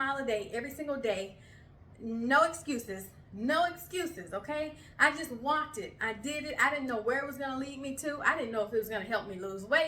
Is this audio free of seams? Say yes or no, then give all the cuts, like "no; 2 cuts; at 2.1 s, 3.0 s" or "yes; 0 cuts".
yes; 0 cuts